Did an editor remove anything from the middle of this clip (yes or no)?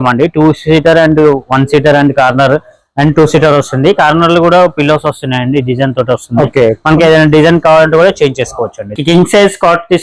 yes